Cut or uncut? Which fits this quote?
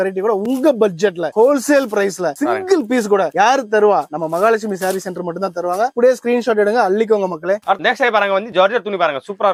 uncut